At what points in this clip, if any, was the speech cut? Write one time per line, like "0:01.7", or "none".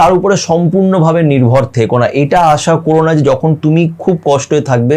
none